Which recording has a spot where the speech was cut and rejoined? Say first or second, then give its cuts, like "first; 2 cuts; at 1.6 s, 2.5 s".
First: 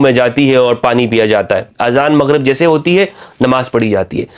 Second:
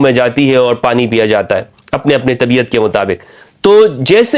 first; 1 cut; at 1.7 s